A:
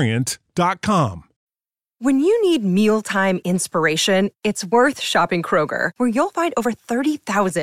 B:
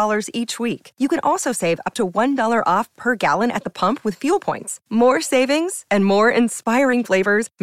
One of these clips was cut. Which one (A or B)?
A